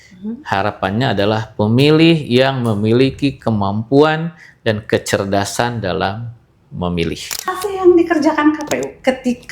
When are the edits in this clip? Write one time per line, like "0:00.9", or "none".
0:07.6